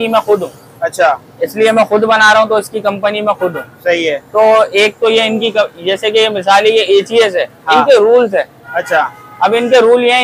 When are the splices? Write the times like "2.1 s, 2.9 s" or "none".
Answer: none